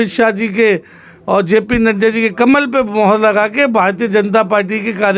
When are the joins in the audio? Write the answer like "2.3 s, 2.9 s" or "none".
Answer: none